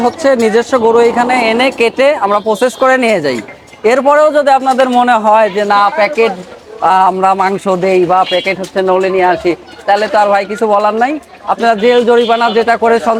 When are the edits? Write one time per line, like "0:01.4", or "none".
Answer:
none